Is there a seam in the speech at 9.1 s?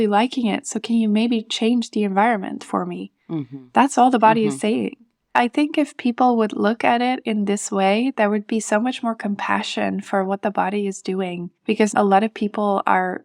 no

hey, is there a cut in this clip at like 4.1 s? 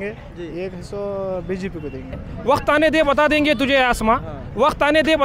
no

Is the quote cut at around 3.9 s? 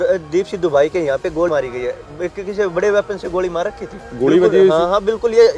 no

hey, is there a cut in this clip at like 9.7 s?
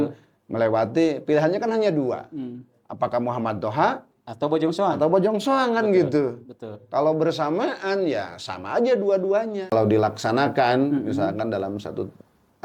yes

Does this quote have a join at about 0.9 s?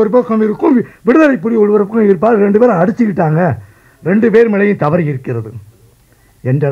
no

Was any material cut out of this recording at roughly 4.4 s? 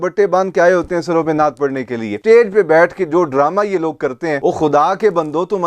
yes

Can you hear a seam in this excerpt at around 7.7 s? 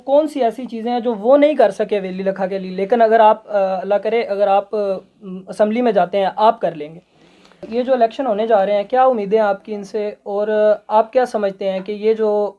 yes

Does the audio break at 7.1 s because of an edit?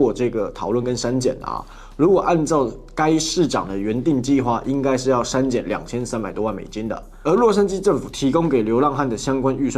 yes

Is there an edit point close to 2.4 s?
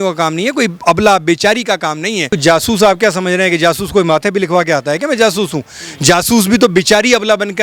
yes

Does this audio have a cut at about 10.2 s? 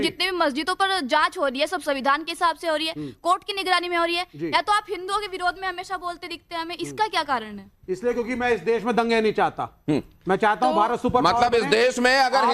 yes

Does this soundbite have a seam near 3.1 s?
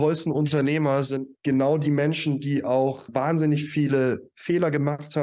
yes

